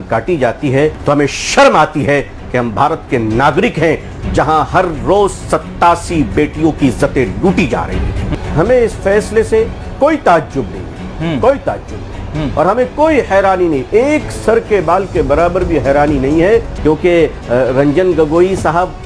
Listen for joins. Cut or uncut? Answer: cut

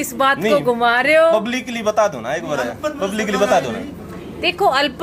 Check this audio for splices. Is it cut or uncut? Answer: uncut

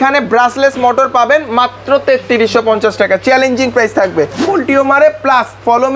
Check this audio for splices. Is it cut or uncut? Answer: cut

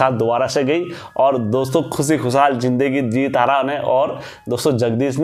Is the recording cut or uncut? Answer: uncut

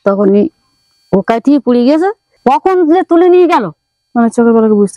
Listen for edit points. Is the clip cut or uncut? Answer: cut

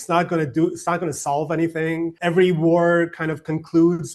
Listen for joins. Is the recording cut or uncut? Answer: cut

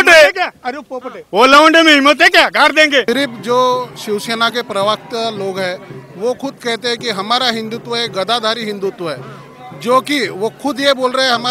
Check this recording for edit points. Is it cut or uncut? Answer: cut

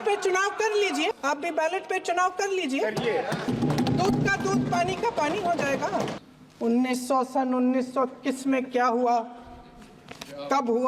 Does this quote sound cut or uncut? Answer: cut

